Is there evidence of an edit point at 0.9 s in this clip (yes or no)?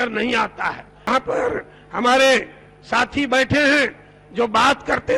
yes